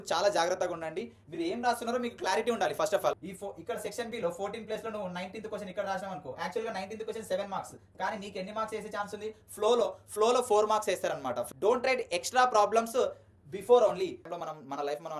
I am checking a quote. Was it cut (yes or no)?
yes